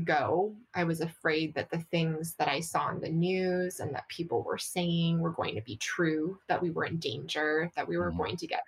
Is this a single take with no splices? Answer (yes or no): yes